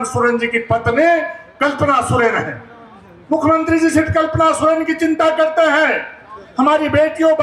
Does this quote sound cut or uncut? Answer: uncut